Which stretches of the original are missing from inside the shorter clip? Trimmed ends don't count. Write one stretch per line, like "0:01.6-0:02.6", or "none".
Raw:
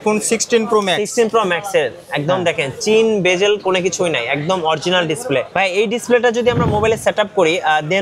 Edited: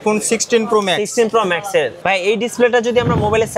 0:02.0-0:05.5